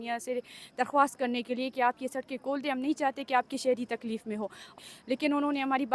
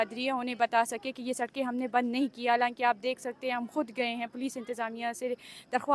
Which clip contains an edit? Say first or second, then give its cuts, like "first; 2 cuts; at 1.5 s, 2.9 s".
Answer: first; 1 cut; at 4.7 s